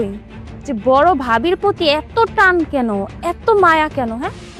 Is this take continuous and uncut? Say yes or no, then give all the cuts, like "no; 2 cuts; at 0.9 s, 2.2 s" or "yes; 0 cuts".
yes; 0 cuts